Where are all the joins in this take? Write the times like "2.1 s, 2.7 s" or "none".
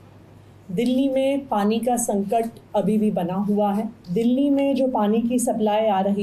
4.0 s